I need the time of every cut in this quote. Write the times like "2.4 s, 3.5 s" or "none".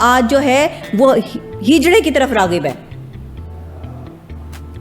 none